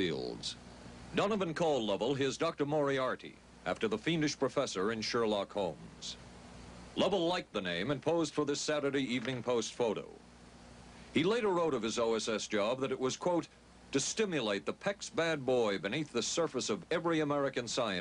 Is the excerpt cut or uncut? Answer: uncut